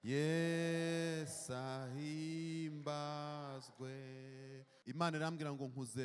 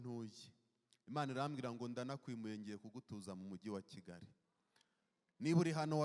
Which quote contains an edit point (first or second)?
first